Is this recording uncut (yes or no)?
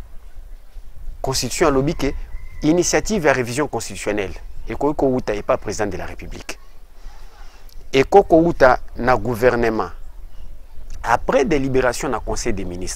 yes